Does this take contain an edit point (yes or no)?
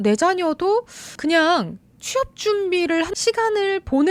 no